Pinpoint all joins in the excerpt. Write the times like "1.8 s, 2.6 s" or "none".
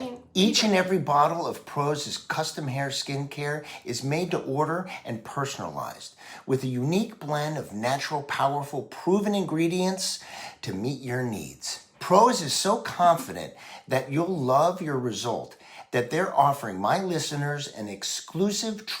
11.9 s